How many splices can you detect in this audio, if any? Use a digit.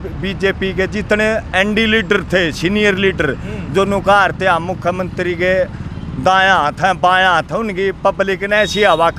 0